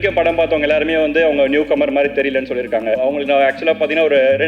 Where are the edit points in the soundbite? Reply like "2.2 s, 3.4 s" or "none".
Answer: 3.0 s